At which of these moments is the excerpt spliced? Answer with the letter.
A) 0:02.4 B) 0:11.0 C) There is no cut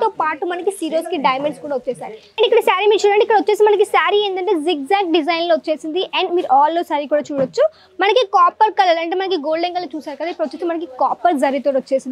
A